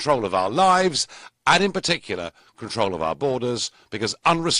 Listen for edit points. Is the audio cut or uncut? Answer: uncut